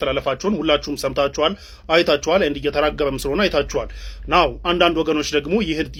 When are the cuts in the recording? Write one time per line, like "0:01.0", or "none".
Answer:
none